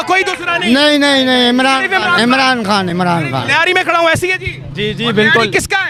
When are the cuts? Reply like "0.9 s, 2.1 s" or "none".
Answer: none